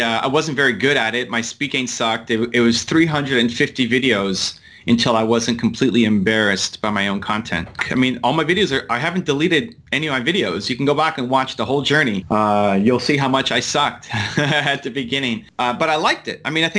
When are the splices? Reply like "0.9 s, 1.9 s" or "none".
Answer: 7.7 s, 12.2 s, 15.2 s